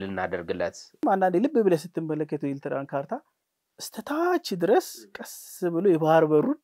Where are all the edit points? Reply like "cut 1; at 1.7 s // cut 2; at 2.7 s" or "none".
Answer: cut 1; at 1.0 s